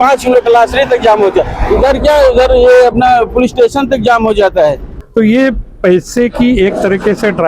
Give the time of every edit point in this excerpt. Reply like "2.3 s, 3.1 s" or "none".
4.9 s